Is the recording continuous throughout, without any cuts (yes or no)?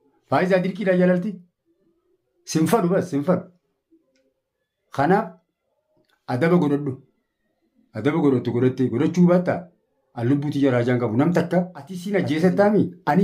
no